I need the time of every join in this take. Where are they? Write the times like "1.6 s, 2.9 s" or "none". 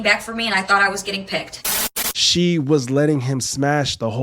1.6 s